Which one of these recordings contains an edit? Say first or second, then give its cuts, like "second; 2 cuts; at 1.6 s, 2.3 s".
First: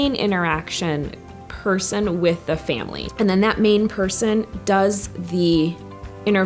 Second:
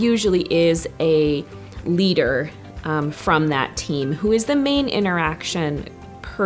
first; 1 cut; at 3.0 s